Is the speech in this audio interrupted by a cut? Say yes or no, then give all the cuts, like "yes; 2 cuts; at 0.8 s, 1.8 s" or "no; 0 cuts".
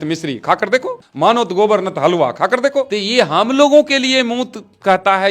yes; 2 cuts; at 1.0 s, 3.0 s